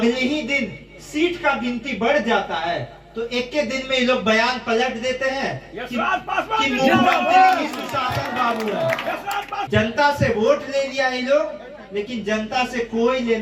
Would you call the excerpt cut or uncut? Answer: cut